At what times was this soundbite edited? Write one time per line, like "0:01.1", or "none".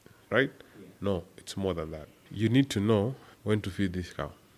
0:02.2